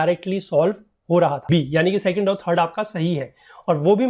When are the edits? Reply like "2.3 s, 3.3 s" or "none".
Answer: 1.4 s